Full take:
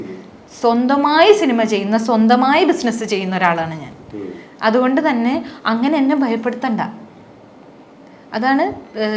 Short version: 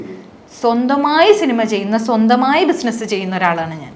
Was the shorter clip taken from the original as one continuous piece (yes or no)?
yes